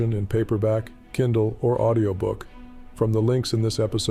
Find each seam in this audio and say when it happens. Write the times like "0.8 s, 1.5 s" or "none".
none